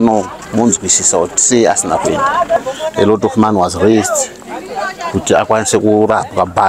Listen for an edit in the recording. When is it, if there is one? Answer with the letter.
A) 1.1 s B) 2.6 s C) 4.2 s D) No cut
B